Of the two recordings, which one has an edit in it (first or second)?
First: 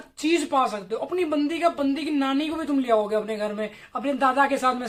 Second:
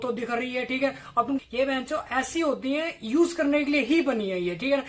second